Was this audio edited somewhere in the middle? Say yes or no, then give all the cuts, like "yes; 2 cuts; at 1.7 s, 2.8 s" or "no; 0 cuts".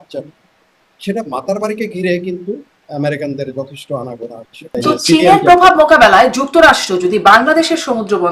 yes; 1 cut; at 4.7 s